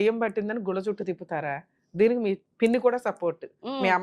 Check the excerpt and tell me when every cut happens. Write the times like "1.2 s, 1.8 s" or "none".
2.5 s